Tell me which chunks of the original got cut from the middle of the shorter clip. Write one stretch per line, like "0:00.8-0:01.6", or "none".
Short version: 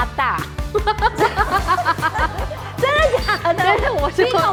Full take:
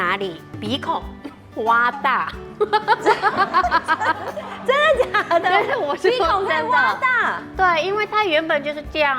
none